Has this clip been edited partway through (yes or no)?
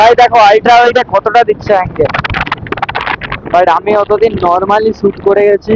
no